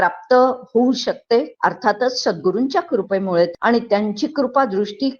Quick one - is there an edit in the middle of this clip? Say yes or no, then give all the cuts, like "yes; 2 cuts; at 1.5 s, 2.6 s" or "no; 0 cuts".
yes; 2 cuts; at 1.5 s, 3.5 s